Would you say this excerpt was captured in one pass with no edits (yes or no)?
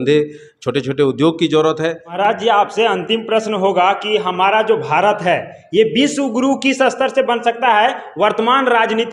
no